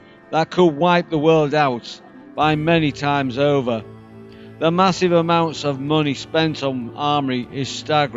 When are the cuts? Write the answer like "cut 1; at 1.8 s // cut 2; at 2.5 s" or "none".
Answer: cut 1; at 4.7 s